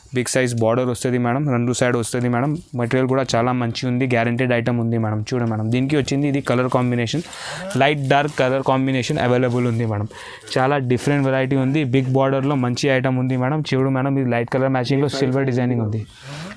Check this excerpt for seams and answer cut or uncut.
uncut